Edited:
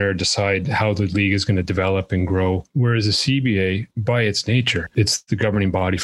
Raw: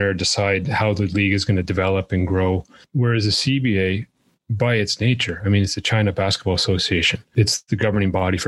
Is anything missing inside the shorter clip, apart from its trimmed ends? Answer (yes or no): yes